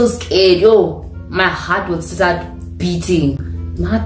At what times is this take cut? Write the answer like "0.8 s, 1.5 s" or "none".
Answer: none